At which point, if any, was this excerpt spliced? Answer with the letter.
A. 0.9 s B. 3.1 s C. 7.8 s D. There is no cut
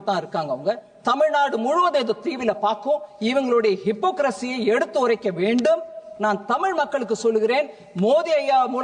D